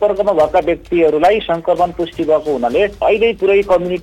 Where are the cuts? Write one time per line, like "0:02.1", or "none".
0:03.0